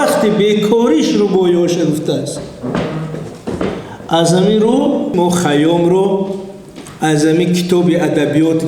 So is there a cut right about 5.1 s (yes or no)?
yes